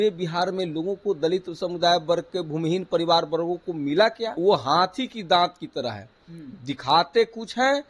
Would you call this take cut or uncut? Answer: cut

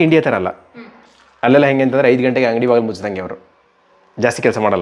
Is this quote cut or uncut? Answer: uncut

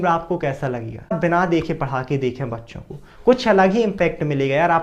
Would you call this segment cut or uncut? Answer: cut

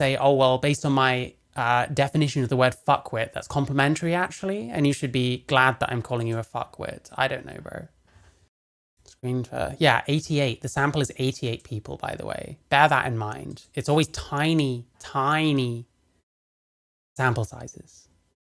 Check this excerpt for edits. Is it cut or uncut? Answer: uncut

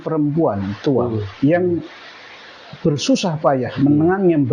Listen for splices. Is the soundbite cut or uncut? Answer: uncut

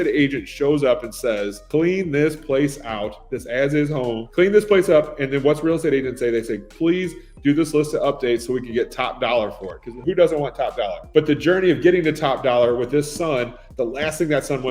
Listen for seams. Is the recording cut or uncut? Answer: cut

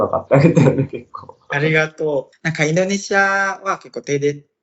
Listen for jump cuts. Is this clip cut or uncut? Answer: cut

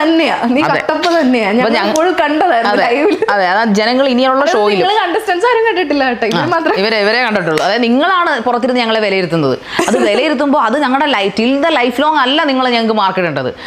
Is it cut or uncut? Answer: uncut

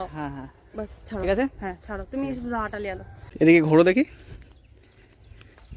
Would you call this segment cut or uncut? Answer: cut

